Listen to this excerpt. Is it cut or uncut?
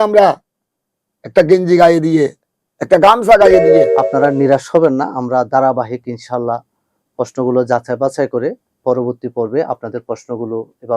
cut